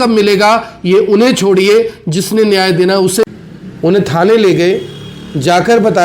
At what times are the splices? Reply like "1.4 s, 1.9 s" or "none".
3.2 s